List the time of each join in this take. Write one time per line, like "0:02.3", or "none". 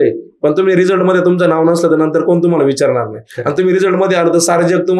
none

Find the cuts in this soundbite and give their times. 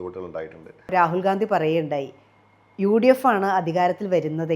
0:00.9

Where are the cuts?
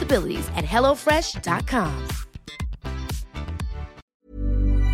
0:04.0

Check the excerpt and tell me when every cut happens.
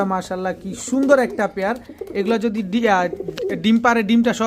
none

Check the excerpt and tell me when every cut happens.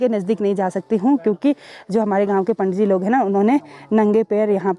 none

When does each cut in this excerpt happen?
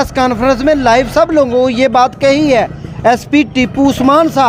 none

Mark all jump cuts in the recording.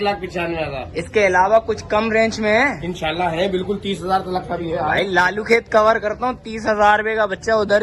none

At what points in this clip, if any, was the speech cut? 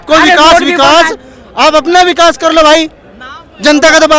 none

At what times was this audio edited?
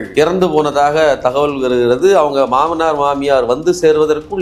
none

